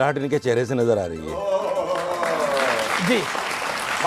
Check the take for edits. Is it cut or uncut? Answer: uncut